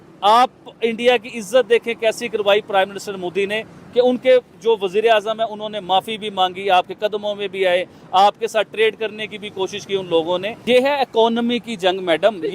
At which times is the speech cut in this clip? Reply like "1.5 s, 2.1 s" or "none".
10.5 s